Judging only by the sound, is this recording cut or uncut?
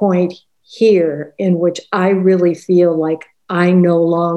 uncut